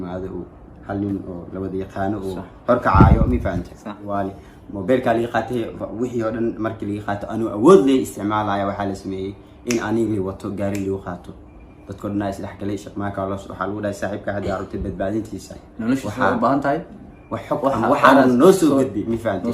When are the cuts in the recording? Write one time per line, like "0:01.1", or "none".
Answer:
0:04.1